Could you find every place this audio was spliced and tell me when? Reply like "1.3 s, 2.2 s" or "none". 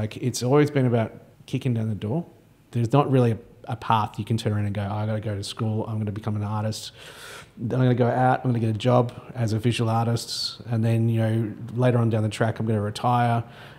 1.3 s, 2.6 s